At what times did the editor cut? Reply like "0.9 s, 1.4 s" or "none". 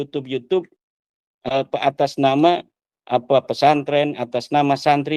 none